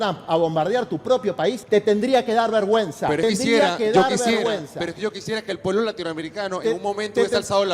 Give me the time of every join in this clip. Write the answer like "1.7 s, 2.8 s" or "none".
1.6 s, 3.2 s